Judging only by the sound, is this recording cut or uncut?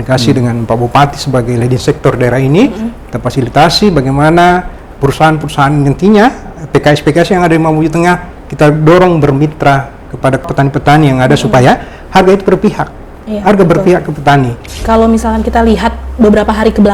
cut